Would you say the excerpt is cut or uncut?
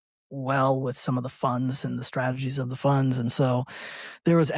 uncut